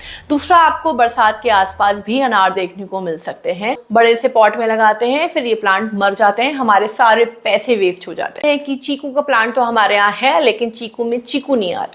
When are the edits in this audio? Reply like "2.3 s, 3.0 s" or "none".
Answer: 3.8 s, 8.4 s